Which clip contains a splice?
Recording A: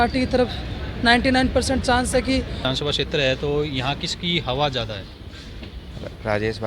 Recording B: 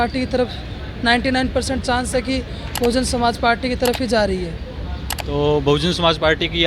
A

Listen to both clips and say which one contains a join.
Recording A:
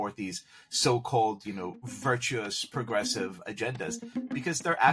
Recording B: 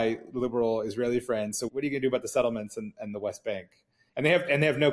B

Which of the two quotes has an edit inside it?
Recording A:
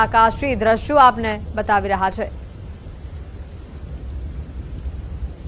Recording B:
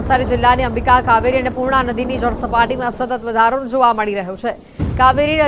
B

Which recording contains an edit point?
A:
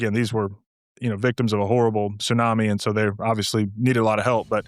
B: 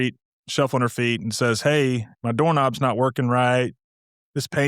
B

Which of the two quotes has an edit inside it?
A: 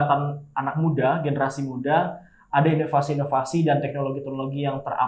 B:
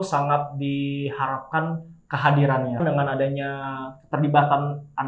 B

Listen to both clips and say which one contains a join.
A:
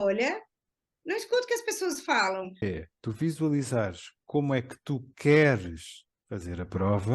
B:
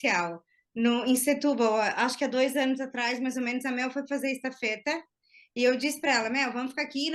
A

